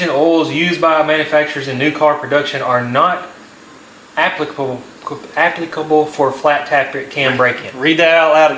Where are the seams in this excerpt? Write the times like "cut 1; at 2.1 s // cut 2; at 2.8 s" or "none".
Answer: none